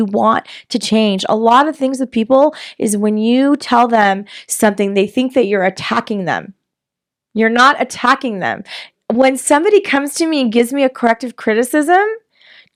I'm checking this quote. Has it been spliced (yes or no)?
no